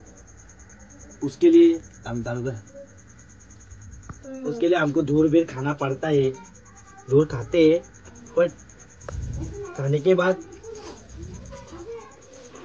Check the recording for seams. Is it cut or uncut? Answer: uncut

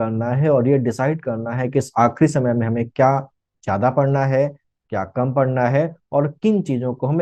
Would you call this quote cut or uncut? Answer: uncut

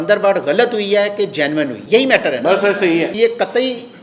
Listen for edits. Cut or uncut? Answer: cut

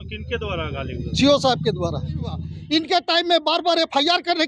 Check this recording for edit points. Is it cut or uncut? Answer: cut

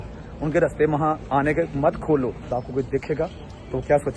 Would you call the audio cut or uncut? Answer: cut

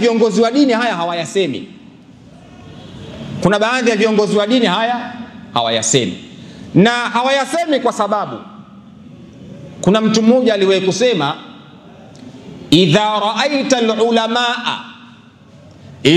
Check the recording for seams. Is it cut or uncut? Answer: uncut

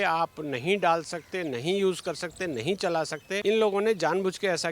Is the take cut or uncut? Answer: cut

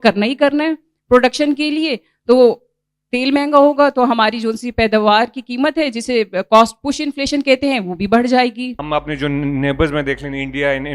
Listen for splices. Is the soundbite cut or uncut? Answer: cut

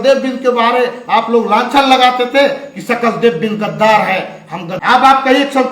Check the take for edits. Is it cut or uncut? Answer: cut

